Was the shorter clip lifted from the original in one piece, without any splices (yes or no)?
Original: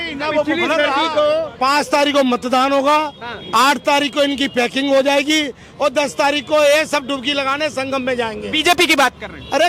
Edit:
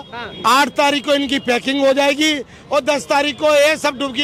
yes